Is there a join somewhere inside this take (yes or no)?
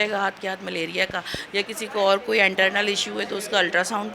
no